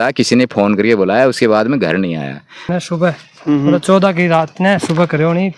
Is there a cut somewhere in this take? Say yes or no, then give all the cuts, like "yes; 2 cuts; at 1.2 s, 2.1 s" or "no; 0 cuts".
yes; 1 cut; at 2.7 s